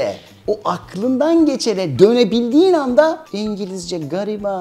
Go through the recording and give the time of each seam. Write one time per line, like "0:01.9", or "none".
0:03.3